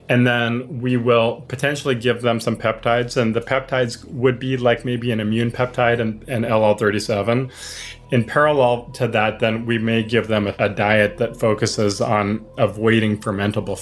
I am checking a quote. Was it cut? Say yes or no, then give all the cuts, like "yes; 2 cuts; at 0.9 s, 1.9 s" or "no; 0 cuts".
yes; 2 cuts; at 7.9 s, 10.5 s